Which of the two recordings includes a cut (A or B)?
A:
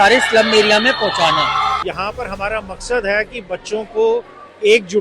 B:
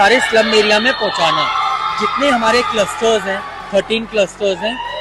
A